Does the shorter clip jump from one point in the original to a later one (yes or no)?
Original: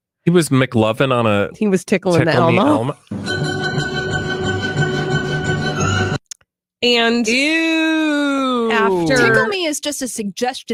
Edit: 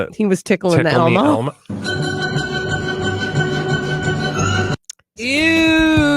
yes